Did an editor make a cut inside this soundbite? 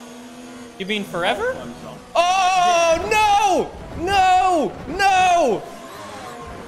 no; 0 cuts

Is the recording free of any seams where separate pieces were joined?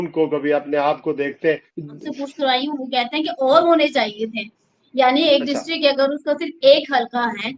no; 1 cut; at 2.0 s

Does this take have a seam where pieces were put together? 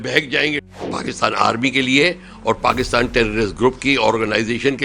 yes; 1 cut; at 0.9 s

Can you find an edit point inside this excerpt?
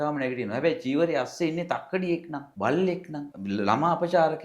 yes; 2 cuts; at 2.4 s, 3.3 s

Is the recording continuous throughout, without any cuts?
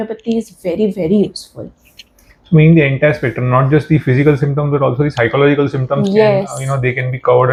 yes; 0 cuts

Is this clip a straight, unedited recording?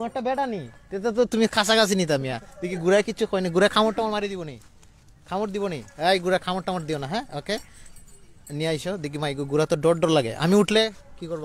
yes; 0 cuts

